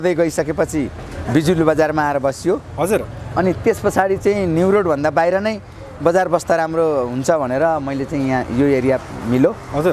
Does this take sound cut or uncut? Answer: uncut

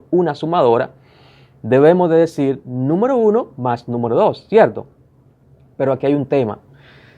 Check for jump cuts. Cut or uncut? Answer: uncut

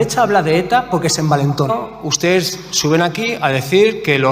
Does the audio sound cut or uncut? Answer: cut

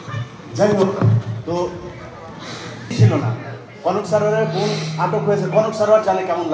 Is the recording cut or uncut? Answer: cut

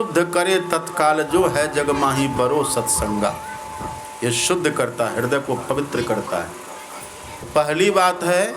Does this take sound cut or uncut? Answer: cut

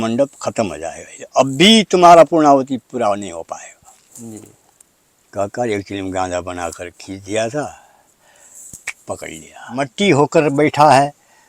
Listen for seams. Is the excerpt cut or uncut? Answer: cut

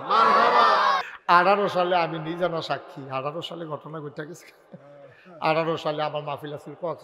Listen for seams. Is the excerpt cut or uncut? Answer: cut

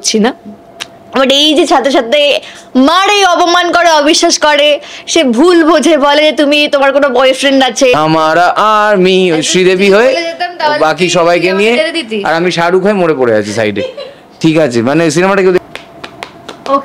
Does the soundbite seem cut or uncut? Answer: cut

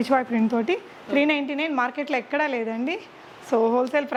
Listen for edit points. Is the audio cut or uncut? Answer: uncut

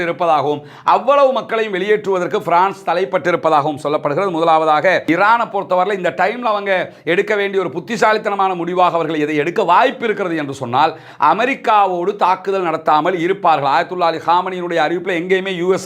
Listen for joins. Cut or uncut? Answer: cut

